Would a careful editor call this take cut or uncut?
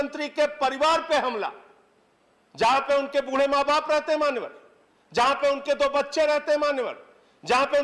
uncut